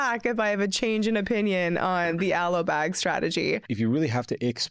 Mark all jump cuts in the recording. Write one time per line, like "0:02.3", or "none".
0:03.6